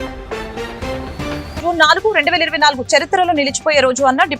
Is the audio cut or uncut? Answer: cut